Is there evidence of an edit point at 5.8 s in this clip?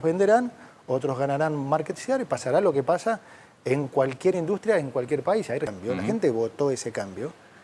yes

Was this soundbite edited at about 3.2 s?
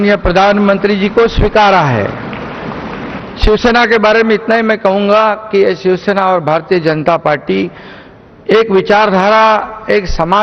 yes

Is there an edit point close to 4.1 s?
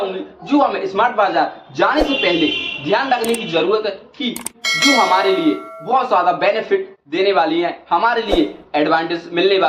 no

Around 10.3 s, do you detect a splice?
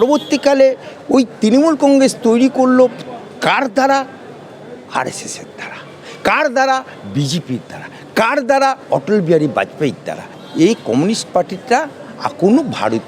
yes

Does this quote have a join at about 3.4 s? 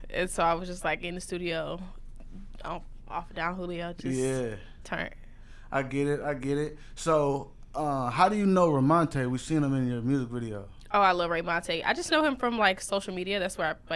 no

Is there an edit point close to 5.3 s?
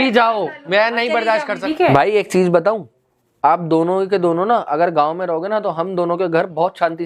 no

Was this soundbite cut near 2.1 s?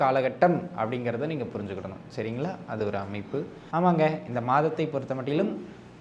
no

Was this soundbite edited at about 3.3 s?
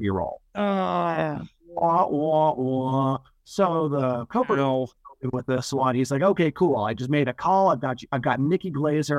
no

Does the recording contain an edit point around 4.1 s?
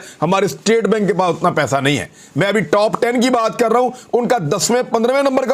no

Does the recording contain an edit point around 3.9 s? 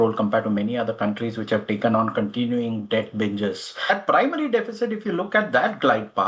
yes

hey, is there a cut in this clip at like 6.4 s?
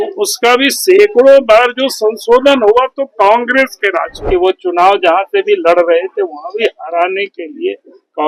no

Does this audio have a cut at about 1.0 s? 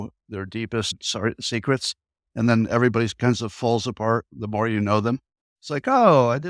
yes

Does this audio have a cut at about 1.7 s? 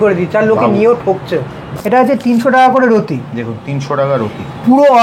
yes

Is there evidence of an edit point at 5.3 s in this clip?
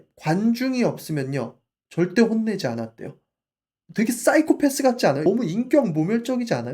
yes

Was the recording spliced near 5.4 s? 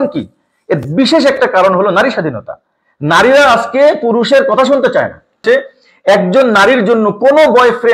yes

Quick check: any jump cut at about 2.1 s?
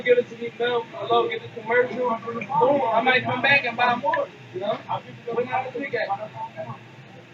no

